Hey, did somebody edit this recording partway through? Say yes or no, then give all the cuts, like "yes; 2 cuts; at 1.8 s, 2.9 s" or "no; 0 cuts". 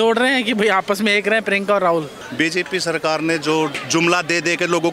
yes; 2 cuts; at 2.2 s, 3.8 s